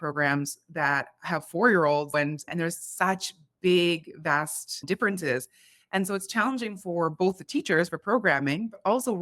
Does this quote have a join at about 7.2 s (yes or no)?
no